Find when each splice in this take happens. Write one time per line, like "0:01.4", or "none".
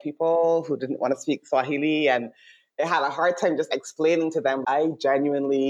0:04.6